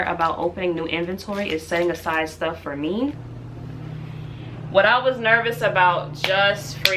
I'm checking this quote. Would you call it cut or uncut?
cut